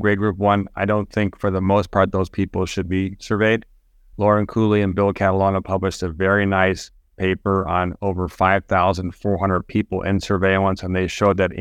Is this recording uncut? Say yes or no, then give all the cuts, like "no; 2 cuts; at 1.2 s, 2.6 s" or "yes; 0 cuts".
yes; 0 cuts